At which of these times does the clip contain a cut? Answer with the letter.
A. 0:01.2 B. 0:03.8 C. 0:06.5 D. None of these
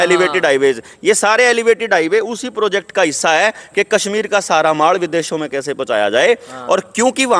D